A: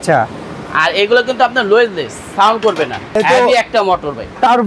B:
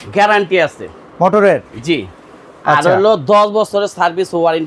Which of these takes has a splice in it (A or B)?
A